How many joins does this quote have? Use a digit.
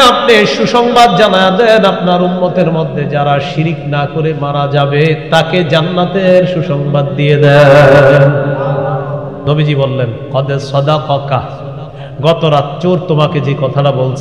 1